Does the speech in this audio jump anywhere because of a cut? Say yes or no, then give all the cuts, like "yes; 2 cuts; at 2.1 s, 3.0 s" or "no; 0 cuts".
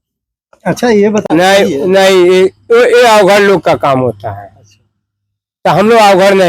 yes; 1 cut; at 1.2 s